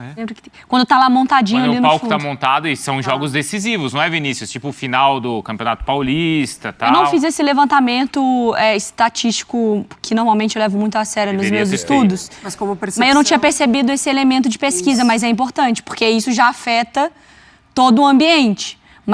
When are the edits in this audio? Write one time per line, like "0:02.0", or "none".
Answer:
none